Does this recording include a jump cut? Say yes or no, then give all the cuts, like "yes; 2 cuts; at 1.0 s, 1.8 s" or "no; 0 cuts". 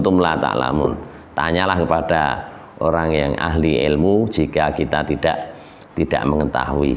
no; 0 cuts